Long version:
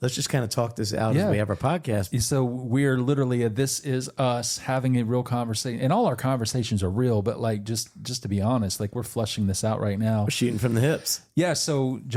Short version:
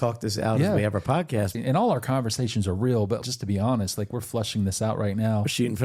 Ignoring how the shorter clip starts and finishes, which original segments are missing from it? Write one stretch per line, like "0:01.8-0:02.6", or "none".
0:02.1-0:05.7
0:07.4-0:08.0